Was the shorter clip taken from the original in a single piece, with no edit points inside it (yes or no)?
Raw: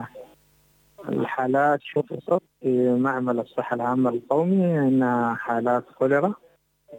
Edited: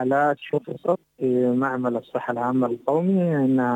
yes